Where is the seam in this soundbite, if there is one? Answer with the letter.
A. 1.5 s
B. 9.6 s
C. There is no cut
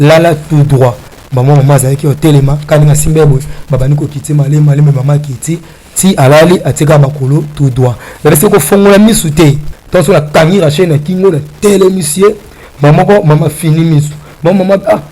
B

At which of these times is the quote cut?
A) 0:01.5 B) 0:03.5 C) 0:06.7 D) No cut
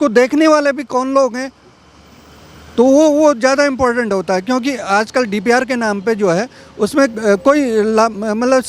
D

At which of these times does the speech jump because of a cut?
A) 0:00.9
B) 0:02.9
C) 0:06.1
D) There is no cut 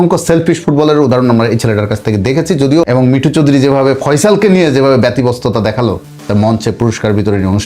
B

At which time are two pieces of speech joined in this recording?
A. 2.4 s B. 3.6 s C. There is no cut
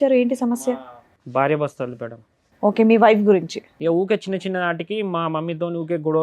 B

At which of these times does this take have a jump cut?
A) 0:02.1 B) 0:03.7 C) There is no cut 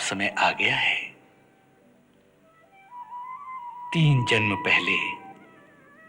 C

